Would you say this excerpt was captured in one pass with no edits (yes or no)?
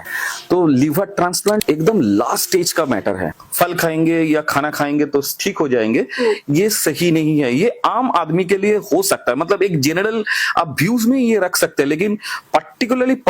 no